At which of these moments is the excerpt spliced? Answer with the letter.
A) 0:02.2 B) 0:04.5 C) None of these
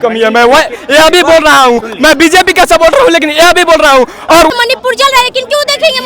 B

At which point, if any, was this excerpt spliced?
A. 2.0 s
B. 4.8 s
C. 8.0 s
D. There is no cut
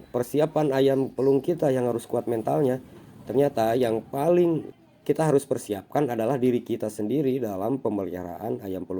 B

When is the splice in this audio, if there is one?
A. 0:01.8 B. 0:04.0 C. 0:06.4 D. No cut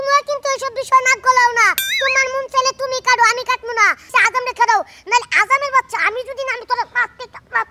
B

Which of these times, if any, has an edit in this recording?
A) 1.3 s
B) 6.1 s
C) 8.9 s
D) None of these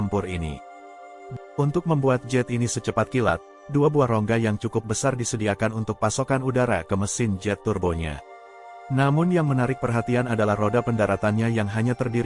A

